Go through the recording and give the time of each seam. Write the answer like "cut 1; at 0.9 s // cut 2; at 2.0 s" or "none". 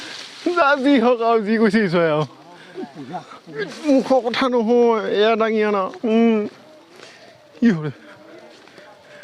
cut 1; at 3.7 s